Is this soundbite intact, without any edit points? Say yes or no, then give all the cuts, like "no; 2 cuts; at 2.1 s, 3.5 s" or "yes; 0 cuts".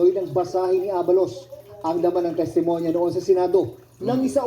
no; 1 cut; at 3.5 s